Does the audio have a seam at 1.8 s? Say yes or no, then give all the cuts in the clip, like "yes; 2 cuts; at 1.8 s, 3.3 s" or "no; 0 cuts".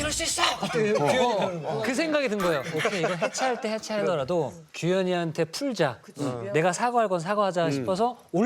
yes; 1 cut; at 1.8 s